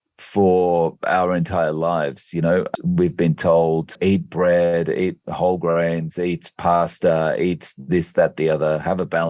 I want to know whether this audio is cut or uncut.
cut